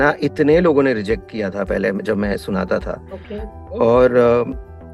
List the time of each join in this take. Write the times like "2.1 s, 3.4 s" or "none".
none